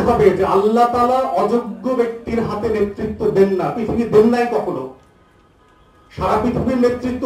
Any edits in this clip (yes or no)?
no